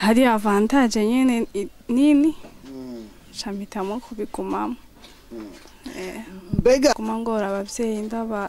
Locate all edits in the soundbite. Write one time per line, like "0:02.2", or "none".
0:06.9